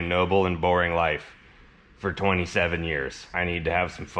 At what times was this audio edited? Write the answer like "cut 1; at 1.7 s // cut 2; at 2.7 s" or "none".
cut 1; at 3.2 s